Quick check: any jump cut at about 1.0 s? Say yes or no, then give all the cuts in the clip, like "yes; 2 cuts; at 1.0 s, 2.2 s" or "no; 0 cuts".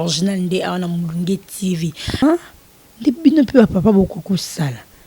no; 1 cut; at 2.2 s